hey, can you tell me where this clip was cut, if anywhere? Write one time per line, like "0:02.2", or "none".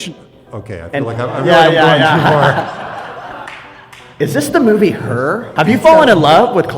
0:05.5